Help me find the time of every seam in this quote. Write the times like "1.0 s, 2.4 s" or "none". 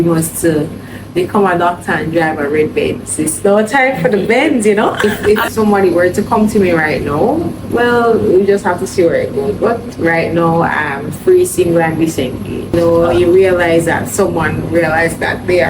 5.0 s, 12.7 s